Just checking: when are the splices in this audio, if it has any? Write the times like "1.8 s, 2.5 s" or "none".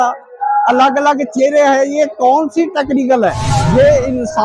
3.5 s